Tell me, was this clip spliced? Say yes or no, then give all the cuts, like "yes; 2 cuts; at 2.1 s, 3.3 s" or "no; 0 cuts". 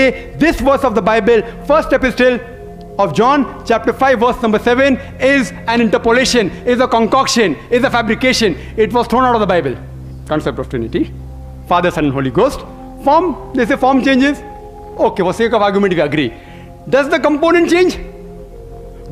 yes; 1 cut; at 9.9 s